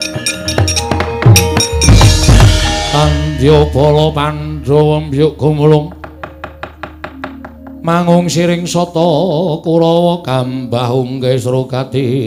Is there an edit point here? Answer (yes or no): no